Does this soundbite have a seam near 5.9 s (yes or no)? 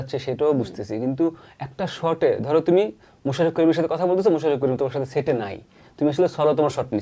no